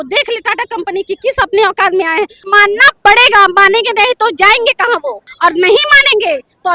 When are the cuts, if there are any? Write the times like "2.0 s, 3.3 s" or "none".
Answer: 2.5 s, 5.3 s